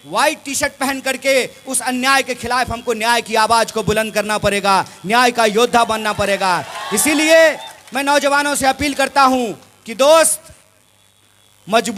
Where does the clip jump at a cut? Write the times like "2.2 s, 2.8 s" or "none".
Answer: none